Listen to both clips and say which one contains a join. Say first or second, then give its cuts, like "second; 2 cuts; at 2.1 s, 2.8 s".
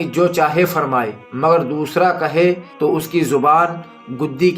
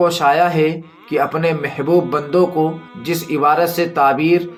first; 1 cut; at 2.7 s